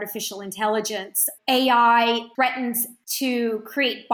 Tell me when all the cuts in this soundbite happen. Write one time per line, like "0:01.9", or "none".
0:01.3
0:02.5